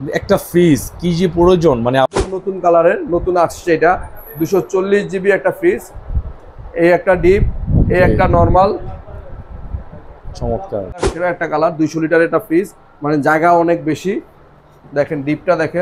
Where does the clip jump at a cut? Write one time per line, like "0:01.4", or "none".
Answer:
0:02.1
0:11.1